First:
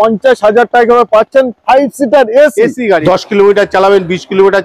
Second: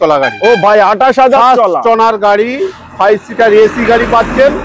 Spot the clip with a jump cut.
first; 1 cut; at 3.0 s

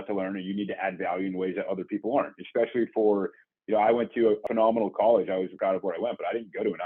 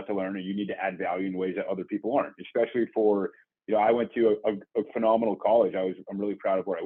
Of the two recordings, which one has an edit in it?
first; 2 cuts; at 4.4 s, 5.5 s

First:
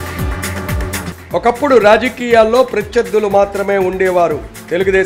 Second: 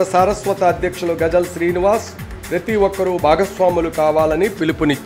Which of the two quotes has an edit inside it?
first; 1 cut; at 1.1 s

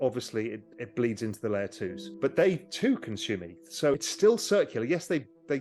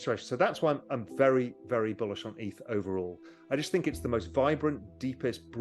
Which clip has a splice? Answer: first; 1 cut; at 4.0 s

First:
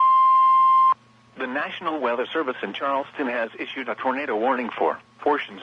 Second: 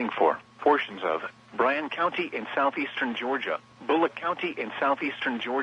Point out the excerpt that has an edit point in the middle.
first; 1 cut; at 0.9 s

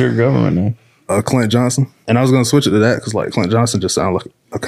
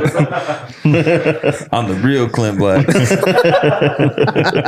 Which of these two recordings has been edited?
first; 1 cut; at 1.9 s

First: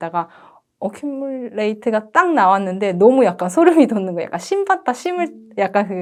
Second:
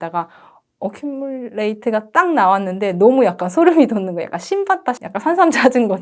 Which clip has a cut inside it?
second; 1 cut; at 5.0 s

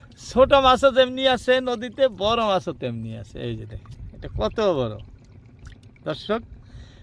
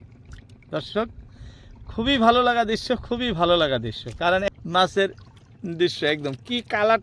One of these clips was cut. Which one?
second; 1 cut; at 4.5 s

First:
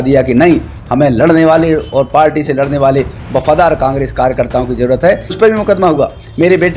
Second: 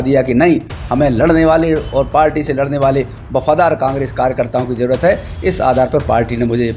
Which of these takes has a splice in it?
first; 1 cut; at 5.3 s

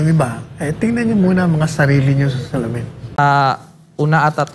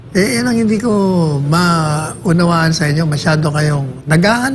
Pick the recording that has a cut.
first; 1 cut; at 3.2 s

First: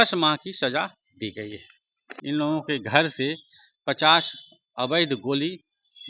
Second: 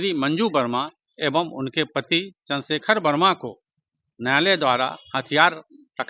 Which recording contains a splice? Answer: first; 1 cut; at 2.1 s

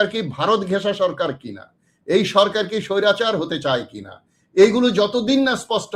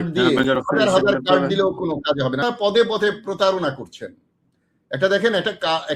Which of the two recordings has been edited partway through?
second; 1 cut; at 2.4 s

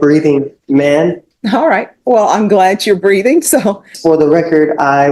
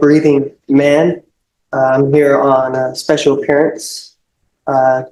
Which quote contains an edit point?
first; 2 cuts; at 1.3 s, 3.9 s

